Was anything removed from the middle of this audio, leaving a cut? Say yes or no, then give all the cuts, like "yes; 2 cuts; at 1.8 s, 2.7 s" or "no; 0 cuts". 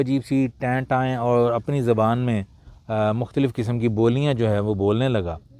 no; 0 cuts